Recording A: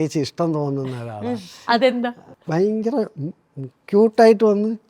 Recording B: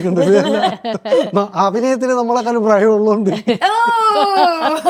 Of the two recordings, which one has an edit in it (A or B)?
A